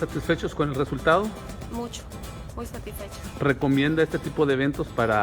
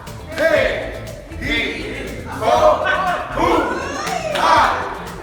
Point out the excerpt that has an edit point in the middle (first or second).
second